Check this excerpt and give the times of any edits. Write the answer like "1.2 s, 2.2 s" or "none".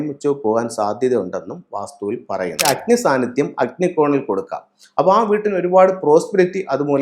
2.6 s